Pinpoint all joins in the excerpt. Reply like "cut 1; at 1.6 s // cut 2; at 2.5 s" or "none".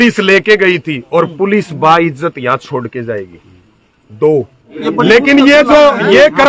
cut 1; at 4.8 s